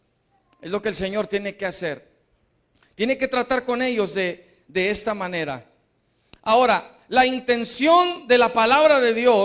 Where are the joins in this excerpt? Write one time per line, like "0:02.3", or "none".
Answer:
0:02.4